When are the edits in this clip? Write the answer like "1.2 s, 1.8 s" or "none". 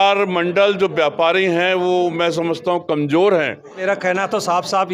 3.8 s